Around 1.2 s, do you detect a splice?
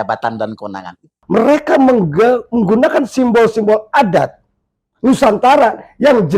yes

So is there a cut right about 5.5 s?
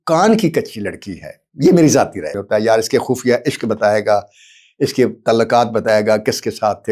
no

